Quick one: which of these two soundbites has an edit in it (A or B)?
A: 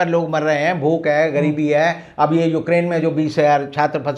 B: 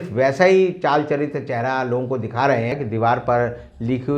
B